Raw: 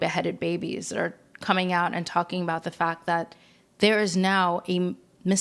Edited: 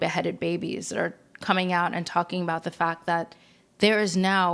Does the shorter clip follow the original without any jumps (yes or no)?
yes